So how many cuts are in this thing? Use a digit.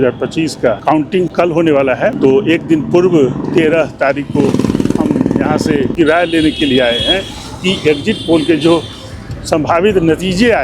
3